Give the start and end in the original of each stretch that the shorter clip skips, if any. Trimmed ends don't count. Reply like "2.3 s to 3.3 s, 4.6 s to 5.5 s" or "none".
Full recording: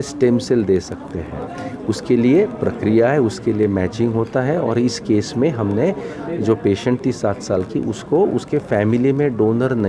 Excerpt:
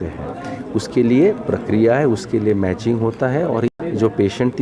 4.8 s to 6.1 s